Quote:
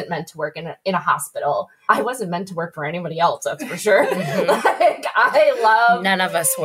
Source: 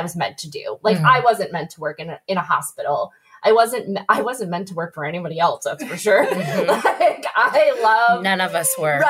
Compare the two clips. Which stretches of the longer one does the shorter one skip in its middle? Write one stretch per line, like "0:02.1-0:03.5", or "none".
0:03.2-0:03.9